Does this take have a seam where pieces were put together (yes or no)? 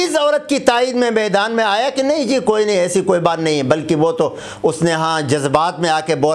no